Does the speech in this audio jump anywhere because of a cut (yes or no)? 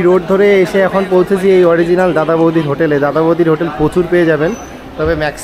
no